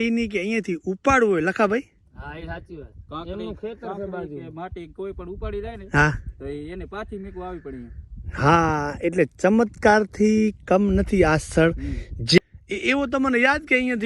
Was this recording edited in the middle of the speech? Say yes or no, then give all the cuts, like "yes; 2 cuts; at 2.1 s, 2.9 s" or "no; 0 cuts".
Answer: yes; 1 cut; at 12.4 s